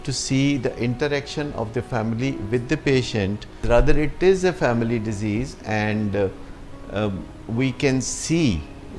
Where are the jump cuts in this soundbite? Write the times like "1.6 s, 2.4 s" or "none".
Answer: 3.5 s